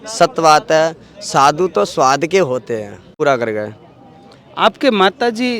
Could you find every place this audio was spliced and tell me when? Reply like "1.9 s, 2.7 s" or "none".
3.1 s

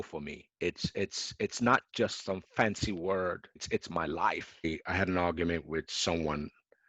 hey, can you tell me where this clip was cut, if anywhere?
4.6 s

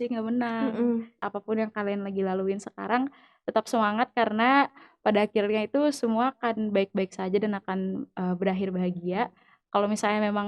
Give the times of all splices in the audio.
1.2 s

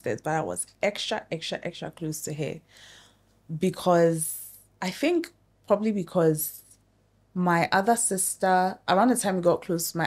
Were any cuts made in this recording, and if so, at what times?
none

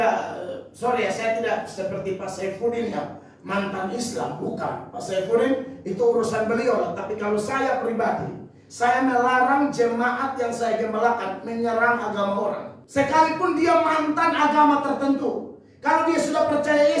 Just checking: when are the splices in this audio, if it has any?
12.7 s

